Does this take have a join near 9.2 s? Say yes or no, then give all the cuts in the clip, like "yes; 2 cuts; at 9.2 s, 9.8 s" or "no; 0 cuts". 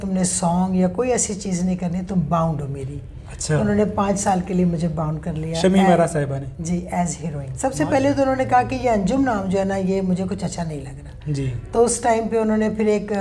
no; 1 cut; at 7.4 s